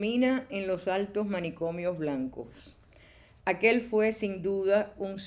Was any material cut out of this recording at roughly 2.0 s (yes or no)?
yes